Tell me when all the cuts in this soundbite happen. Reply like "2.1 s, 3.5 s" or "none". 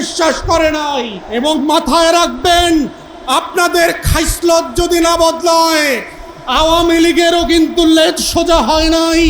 1.2 s